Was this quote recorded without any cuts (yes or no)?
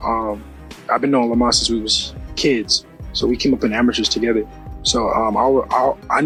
yes